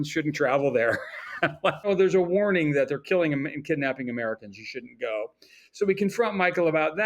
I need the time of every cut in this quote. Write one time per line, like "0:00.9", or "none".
0:01.9